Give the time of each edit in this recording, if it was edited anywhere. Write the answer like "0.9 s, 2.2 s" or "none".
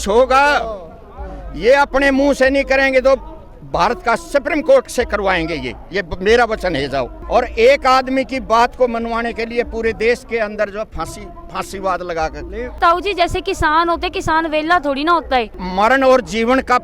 7.2 s, 12.8 s, 15.6 s